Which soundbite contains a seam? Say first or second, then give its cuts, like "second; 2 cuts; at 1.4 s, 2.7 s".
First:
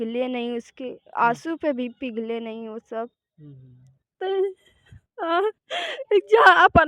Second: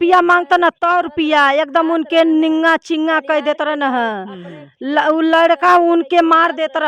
first; 1 cut; at 4.1 s